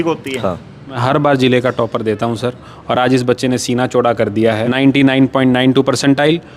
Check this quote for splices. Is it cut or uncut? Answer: cut